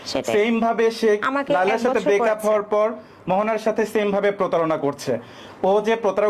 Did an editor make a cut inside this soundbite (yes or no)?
no